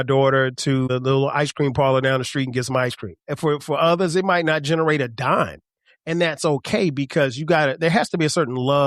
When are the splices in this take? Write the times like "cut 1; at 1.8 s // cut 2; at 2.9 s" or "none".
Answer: cut 1; at 0.9 s // cut 2; at 3.3 s